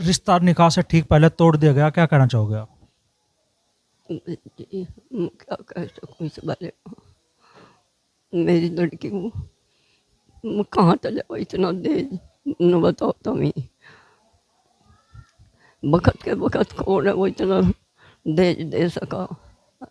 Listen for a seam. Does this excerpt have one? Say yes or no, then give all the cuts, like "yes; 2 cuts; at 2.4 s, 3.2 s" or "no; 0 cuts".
no; 0 cuts